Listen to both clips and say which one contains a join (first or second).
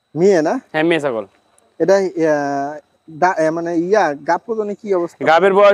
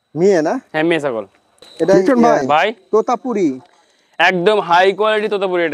second